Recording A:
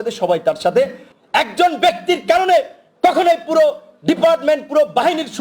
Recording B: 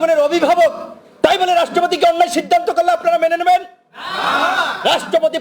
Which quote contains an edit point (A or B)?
A